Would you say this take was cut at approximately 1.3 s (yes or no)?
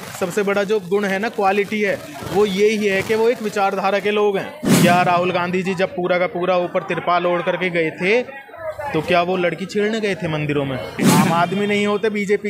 no